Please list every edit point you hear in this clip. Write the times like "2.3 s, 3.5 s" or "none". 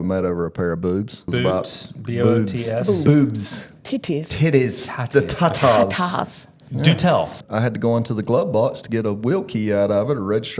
1.3 s, 7.4 s